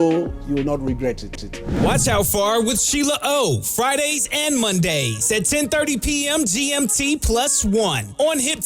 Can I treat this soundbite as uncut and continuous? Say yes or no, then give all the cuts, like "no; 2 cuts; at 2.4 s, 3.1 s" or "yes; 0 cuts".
yes; 0 cuts